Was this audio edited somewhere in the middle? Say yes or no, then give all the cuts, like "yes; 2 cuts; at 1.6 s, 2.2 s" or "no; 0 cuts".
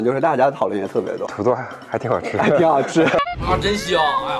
yes; 2 cuts; at 1.2 s, 3.2 s